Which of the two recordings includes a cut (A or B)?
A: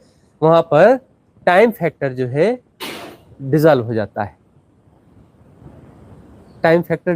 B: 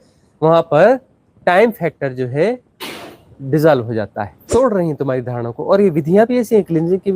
B